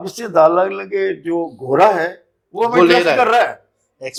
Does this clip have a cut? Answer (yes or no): no